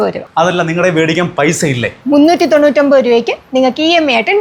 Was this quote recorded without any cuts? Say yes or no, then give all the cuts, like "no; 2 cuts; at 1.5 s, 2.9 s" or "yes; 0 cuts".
yes; 0 cuts